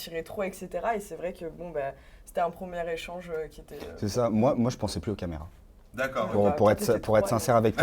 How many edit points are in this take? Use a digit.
0